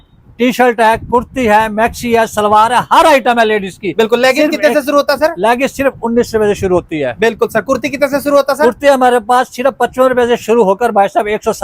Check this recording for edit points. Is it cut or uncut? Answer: uncut